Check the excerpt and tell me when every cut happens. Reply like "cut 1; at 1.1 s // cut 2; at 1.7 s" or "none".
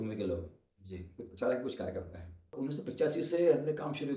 cut 1; at 2.5 s